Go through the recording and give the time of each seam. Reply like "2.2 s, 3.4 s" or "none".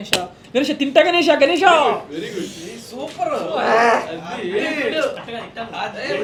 none